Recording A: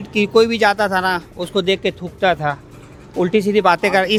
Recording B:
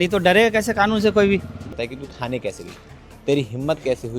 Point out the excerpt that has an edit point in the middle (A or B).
B